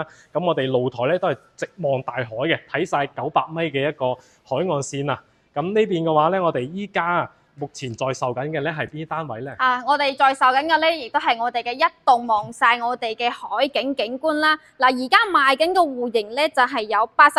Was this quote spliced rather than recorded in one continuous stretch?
no; 0 cuts

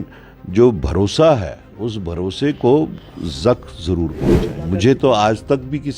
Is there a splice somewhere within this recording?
yes; 1 cut; at 4.6 s

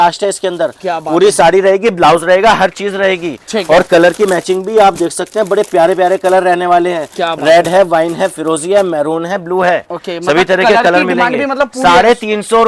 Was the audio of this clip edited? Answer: no; 0 cuts

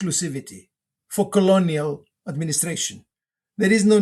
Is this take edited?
no; 0 cuts

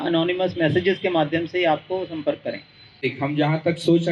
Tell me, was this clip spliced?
yes; 1 cut; at 3.0 s

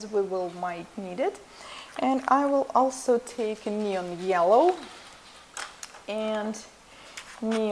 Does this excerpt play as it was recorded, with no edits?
yes; 0 cuts

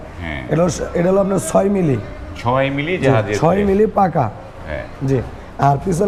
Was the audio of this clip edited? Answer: no; 0 cuts

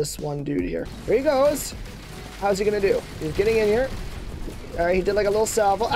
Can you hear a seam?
yes; 1 cut; at 0.9 s

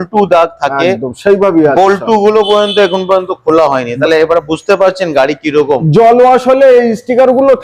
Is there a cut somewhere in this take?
no; 0 cuts

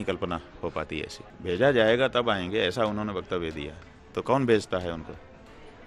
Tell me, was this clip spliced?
yes; 1 cut; at 1.2 s

